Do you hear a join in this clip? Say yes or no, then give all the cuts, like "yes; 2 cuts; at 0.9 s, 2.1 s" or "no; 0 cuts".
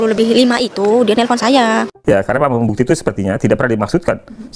no; 0 cuts